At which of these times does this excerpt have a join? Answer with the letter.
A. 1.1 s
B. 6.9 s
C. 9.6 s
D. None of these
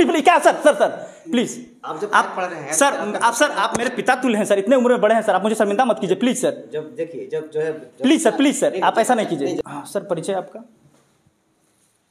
C